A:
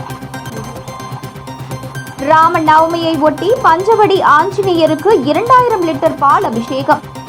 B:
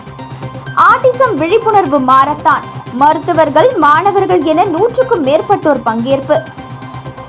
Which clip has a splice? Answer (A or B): A